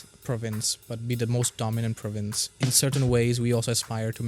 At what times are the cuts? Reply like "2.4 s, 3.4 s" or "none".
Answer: 2.5 s